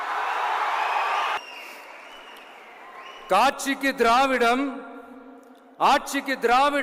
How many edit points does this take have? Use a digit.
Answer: 1